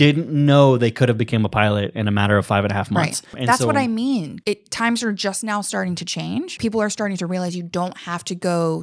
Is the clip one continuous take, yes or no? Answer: no